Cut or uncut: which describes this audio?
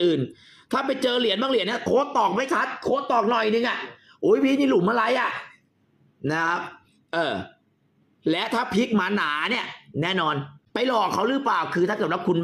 cut